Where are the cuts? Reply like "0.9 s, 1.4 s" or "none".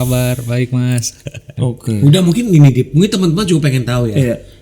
1.5 s